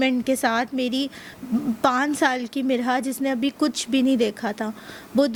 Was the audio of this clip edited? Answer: no; 0 cuts

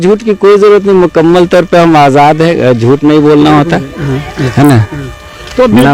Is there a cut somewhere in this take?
no; 0 cuts

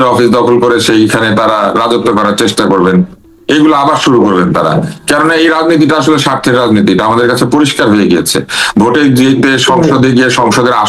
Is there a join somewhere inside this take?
no; 0 cuts

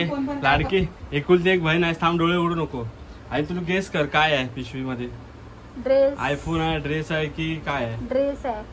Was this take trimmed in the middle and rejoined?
no; 0 cuts

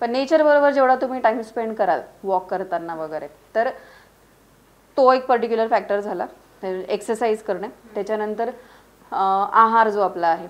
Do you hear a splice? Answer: no; 0 cuts

